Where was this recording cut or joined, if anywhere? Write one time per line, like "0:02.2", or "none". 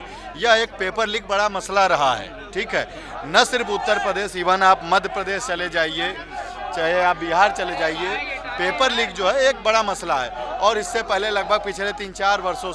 none